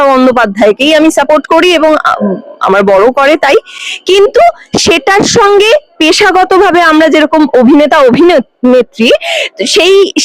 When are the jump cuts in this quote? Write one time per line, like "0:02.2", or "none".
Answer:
none